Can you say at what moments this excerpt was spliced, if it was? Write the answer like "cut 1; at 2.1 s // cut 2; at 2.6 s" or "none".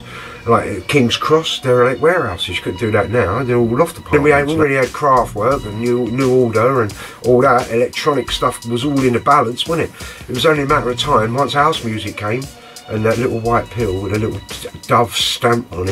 cut 1; at 4.1 s